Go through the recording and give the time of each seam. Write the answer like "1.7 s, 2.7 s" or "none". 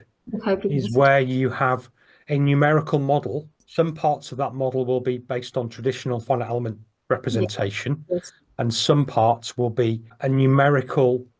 3.6 s, 10.1 s